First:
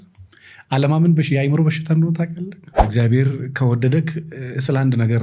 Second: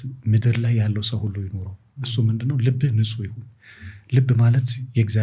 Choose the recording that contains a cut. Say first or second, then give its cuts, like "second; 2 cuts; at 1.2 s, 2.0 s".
first; 1 cut; at 2.8 s